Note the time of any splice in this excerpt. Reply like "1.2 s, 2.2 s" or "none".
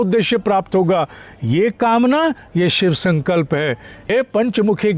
3.9 s